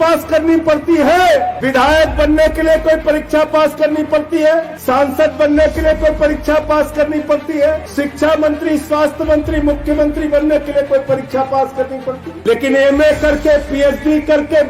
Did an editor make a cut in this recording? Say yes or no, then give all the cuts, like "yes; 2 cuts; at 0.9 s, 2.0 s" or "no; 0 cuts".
yes; 4 cuts; at 1.6 s, 4.7 s, 7.8 s, 12.3 s